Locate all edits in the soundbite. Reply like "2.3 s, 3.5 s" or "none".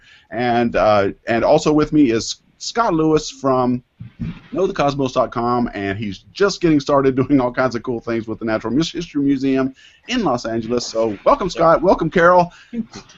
3.6 s

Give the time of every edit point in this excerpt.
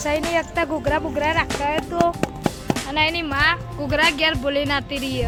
none

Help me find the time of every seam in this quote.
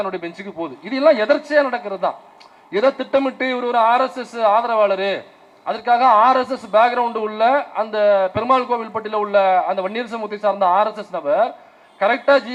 none

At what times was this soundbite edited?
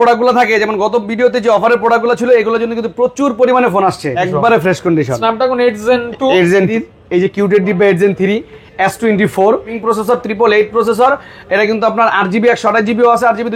4.2 s, 6.7 s, 9.8 s

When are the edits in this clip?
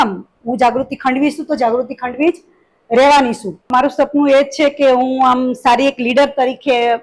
3.7 s

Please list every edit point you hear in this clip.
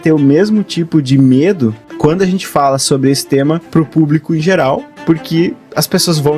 1.9 s, 3.6 s, 4.9 s

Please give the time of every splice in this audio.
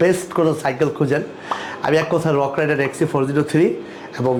none

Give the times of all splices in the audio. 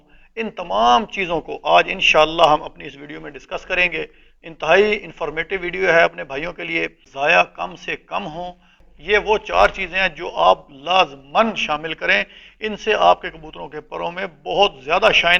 7.0 s, 8.9 s

